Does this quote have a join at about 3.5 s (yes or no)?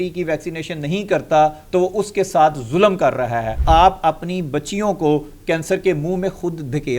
yes